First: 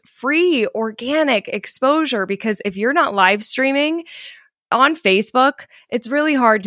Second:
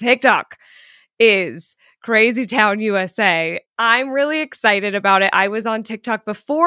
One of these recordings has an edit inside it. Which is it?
second; 1 cut; at 3.6 s

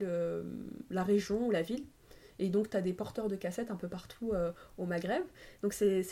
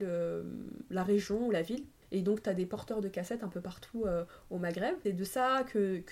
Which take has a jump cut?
second; 2 cuts; at 1.9 s, 5.0 s

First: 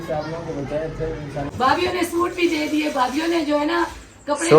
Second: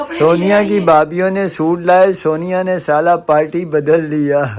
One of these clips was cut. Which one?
first; 1 cut; at 1.5 s

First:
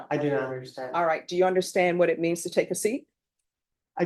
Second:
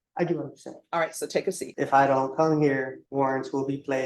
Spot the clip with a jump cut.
second; 2 cuts; at 1.7 s, 3.0 s

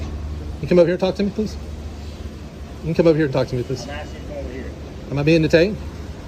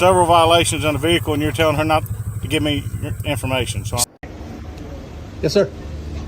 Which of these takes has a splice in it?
second; 1 cut; at 4.1 s

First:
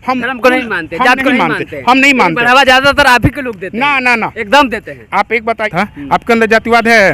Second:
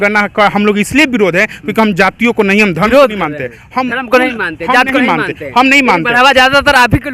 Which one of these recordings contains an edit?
first; 1 cut; at 5.7 s

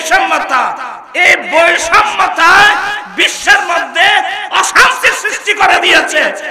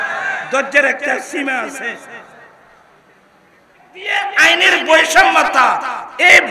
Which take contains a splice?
second; 1 cut; at 4.1 s

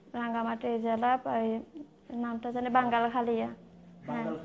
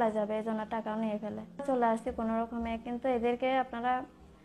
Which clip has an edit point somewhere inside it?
second; 1 cut; at 1.6 s

